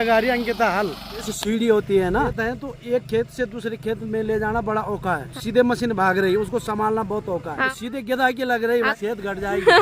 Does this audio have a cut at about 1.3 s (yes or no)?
yes